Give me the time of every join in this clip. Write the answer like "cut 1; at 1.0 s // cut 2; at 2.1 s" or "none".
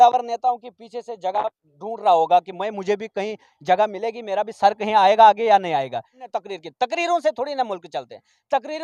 cut 1; at 6.2 s